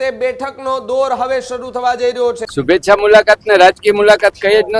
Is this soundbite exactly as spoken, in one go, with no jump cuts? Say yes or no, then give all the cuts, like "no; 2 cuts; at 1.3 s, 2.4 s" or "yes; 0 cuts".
no; 1 cut; at 2.4 s